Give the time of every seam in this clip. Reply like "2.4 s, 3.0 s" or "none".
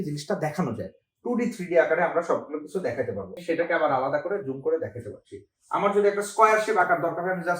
3.4 s